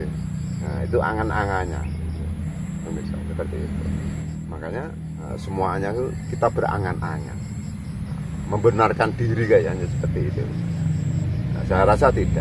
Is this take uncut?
no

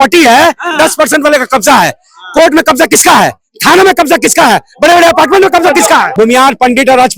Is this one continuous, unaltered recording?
no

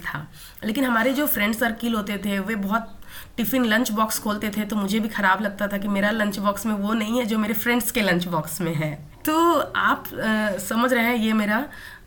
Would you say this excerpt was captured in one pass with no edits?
yes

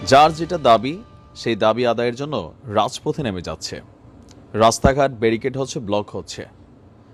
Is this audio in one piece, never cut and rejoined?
yes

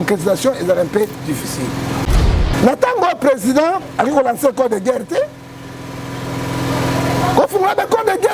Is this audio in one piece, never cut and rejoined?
no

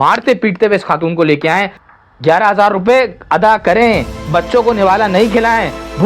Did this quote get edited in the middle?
yes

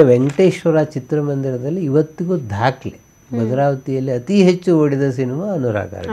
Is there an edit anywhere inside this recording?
no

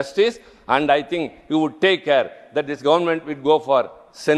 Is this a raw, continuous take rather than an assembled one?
yes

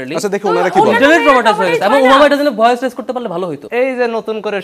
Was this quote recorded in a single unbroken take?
no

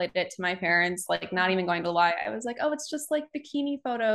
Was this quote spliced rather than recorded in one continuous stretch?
no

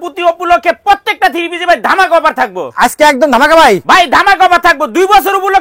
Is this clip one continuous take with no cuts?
yes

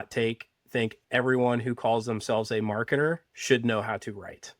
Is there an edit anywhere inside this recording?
yes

